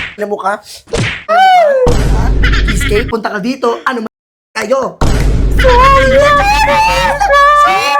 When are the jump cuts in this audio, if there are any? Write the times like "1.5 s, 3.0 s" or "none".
3.1 s